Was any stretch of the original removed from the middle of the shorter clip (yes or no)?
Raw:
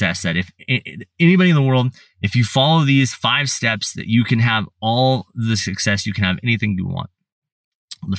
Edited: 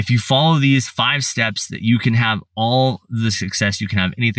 no